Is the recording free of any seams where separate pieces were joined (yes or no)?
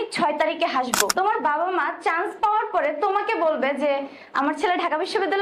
no